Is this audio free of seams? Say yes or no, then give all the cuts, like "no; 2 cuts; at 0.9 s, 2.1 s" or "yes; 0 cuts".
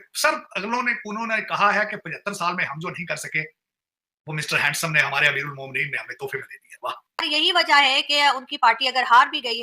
no; 1 cut; at 7.3 s